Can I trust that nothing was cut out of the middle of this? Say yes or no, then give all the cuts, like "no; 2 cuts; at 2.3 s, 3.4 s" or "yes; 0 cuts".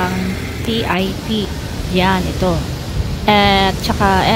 yes; 0 cuts